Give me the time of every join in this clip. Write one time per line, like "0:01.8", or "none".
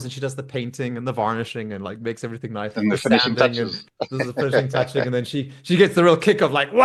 none

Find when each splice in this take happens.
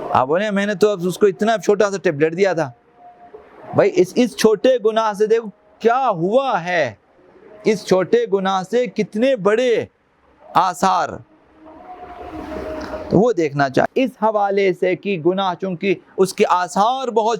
0:13.9

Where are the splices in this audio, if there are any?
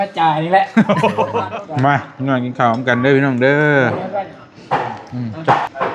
0:01.4

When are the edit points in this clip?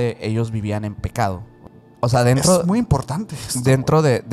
0:01.5

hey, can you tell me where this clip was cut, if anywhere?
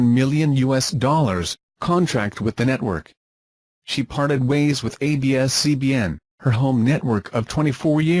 0:04.2

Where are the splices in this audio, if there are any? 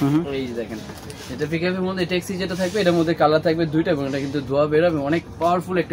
none

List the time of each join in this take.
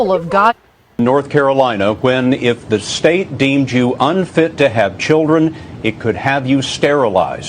0:01.0

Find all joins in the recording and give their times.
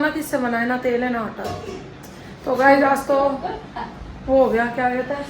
none

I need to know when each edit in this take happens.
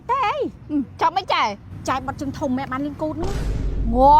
0:01.7

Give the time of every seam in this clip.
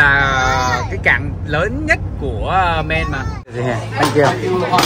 0:03.4

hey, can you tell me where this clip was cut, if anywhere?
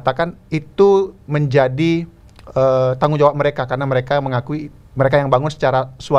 none

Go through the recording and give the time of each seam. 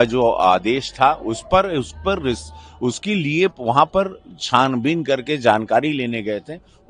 none

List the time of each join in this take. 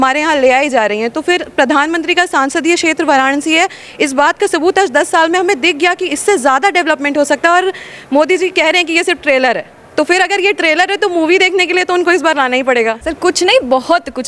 0:13.0

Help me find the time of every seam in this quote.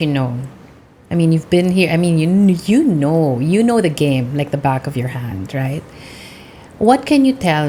none

